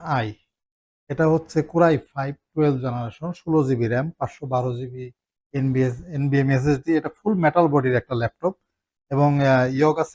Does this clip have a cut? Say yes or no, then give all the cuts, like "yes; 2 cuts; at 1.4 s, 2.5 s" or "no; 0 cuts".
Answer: no; 0 cuts